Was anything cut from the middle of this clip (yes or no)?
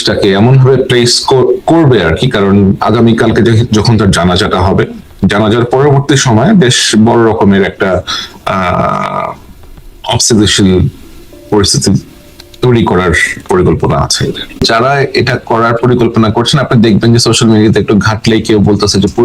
yes